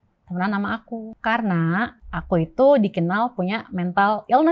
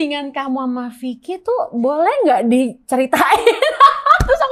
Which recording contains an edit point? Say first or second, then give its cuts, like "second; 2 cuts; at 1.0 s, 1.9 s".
first; 2 cuts; at 1.1 s, 2.1 s